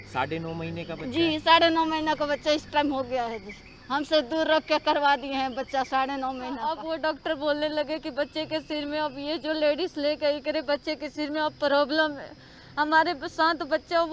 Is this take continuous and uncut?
no; 1 cut; at 6.7 s

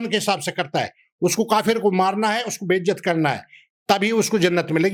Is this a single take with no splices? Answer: yes; 0 cuts

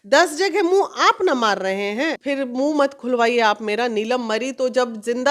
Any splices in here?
yes; 1 cut; at 2.2 s

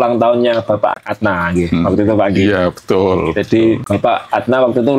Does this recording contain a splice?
yes; 2 cuts; at 1.0 s, 3.8 s

